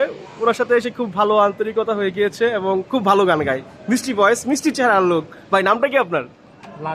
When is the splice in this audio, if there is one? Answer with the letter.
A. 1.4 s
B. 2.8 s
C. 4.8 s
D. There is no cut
D